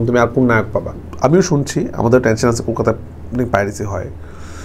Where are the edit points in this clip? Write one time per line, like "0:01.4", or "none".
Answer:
0:01.1